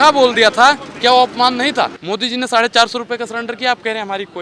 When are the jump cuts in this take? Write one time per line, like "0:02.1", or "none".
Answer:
0:02.0